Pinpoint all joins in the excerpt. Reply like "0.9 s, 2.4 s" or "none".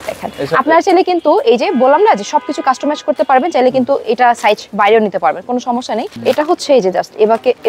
6.1 s

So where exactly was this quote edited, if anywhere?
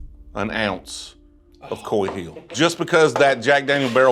2.5 s

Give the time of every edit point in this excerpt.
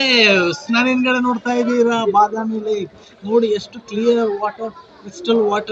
none

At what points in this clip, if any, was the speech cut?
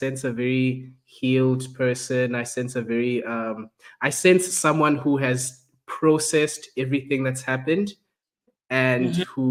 none

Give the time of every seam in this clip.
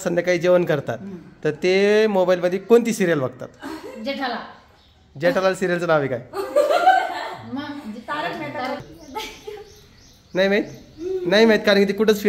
8.8 s

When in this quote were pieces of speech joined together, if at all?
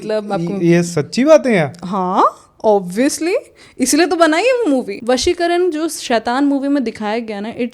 4.9 s

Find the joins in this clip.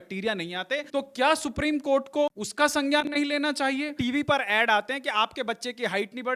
0.9 s, 2.4 s, 3.9 s

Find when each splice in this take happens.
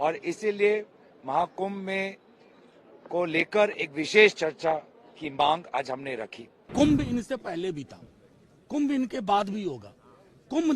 6.7 s

